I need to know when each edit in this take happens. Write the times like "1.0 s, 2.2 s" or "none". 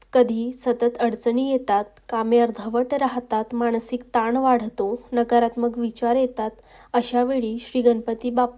none